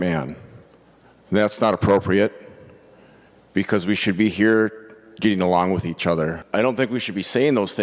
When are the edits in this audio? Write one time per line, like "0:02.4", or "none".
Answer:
0:06.4